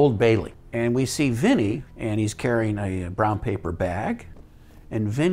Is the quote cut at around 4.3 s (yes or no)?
no